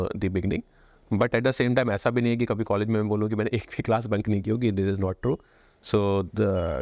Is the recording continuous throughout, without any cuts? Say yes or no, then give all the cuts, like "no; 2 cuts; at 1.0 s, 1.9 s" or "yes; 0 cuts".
yes; 0 cuts